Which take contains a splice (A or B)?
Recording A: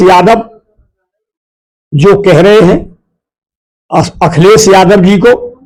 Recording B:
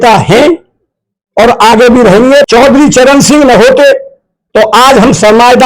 B